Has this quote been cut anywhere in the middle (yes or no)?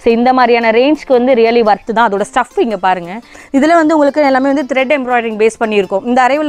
yes